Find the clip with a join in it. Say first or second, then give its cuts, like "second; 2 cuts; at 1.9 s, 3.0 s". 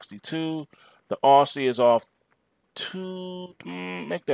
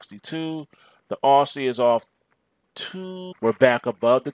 first; 1 cut; at 3.2 s